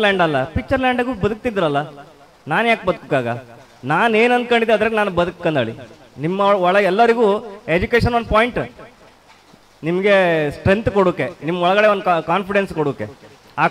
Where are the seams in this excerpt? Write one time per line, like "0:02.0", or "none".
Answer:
none